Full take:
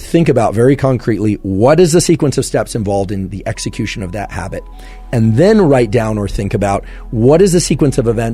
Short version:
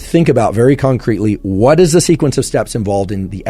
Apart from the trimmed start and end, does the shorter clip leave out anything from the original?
no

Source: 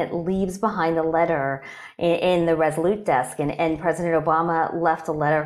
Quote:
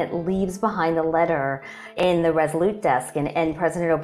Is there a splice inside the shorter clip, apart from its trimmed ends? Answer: yes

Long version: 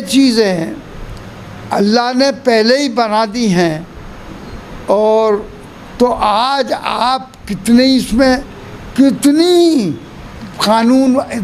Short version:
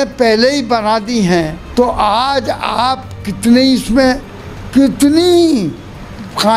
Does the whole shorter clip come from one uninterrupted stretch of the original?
no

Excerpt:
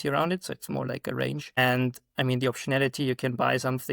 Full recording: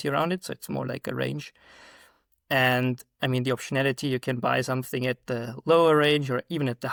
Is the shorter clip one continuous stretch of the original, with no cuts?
no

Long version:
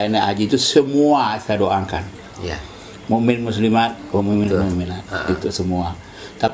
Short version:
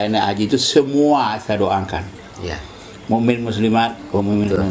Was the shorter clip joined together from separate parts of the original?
no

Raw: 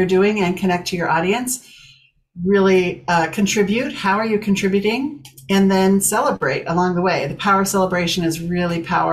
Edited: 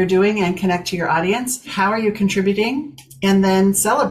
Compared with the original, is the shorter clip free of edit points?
no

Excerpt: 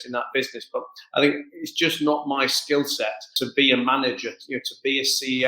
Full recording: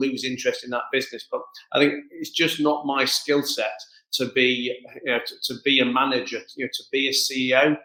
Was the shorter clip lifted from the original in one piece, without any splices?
no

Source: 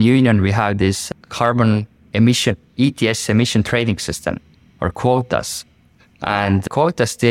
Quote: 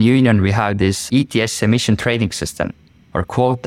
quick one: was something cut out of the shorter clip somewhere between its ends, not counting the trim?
yes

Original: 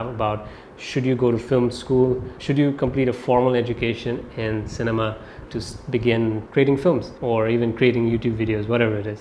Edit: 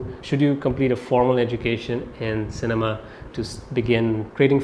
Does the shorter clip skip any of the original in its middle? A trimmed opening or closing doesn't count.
no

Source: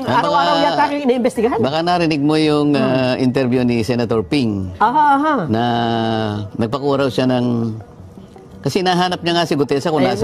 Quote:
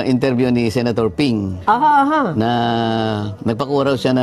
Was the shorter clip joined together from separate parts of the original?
no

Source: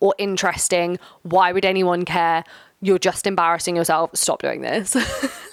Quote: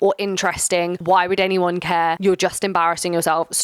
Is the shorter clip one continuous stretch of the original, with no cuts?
no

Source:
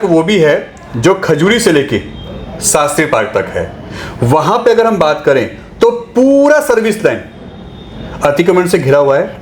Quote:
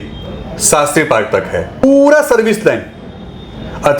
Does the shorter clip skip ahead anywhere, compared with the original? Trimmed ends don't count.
yes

